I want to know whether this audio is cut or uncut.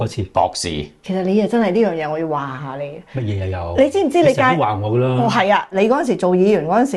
cut